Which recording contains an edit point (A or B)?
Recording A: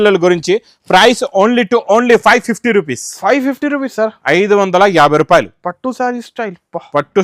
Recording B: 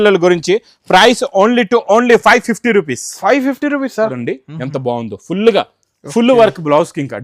B